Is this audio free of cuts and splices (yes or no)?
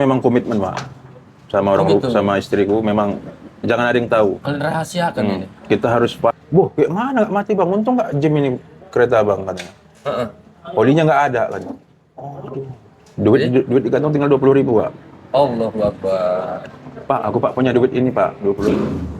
no